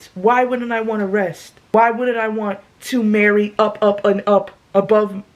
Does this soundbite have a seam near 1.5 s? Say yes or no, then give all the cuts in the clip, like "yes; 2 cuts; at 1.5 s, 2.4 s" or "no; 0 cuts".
yes; 1 cut; at 1.5 s